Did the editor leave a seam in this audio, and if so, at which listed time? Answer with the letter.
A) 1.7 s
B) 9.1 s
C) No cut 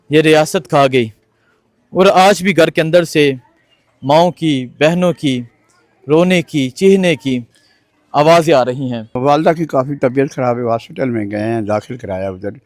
B